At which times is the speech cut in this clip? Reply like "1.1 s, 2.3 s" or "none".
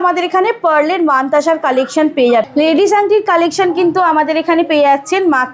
2.5 s